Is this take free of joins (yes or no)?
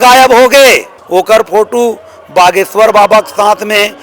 no